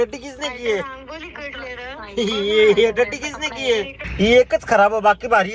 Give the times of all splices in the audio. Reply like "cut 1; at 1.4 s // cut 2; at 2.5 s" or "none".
cut 1; at 4.0 s